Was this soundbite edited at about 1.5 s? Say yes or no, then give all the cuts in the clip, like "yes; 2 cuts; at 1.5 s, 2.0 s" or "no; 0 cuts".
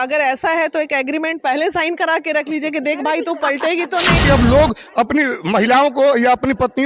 no; 1 cut; at 4.2 s